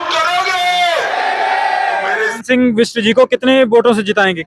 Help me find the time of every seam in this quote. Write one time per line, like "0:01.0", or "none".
0:02.4

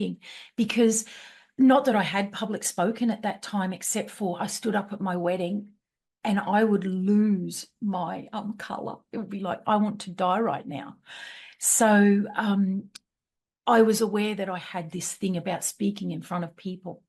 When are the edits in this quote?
none

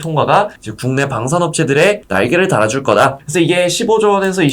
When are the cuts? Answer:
0:03.2

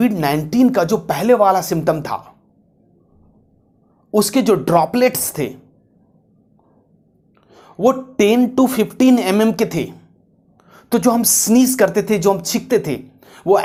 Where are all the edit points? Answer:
none

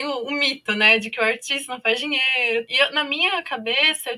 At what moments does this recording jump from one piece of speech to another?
0:02.7

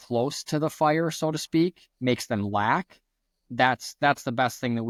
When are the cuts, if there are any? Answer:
none

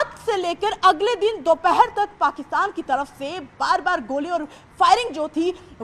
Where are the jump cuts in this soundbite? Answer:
none

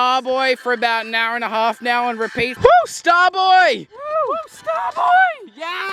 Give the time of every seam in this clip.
0:02.5

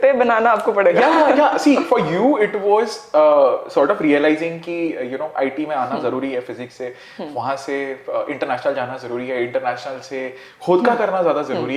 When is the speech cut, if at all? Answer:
none

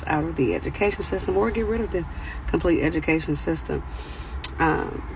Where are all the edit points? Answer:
0:01.8

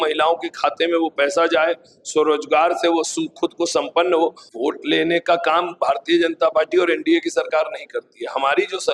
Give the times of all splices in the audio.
0:04.4

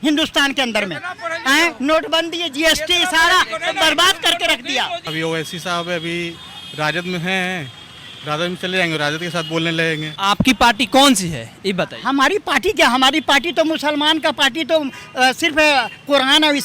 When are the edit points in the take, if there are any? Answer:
0:05.1
0:10.1

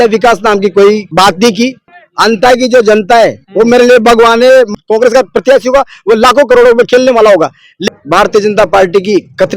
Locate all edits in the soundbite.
0:01.1
0:02.0
0:04.7
0:07.9

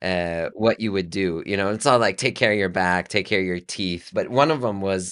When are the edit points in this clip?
0:04.1

